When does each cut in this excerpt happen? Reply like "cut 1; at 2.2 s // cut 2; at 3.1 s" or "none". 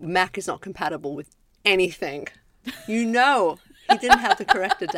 cut 1; at 3.7 s

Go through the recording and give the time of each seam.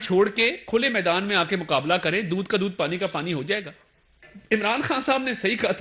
cut 1; at 4.3 s

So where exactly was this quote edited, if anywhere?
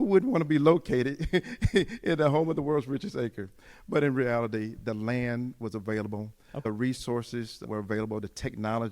cut 1; at 6.6 s // cut 2; at 7.6 s

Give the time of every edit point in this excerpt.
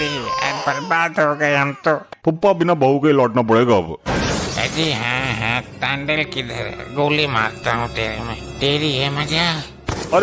cut 1; at 2.1 s

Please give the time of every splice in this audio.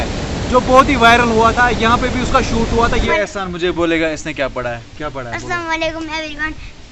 cut 1; at 3.1 s

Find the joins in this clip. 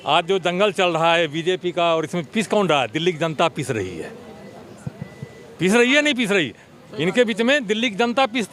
none

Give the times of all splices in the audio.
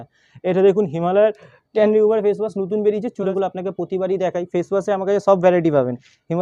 cut 1; at 3.3 s

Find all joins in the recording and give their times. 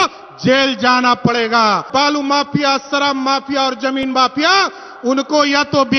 cut 1; at 1.9 s

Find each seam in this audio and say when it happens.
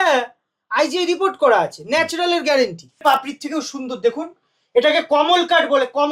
cut 1; at 2.8 s

